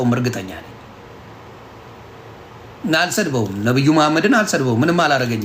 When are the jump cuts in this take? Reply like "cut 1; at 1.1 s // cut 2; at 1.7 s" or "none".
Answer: none